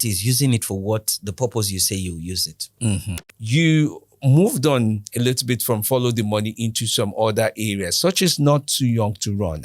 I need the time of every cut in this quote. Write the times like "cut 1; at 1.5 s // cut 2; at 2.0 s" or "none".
cut 1; at 3.2 s